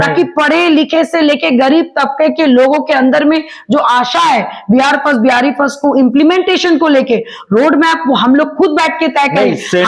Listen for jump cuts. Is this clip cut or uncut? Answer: uncut